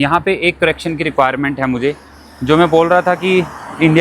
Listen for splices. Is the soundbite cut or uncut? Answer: uncut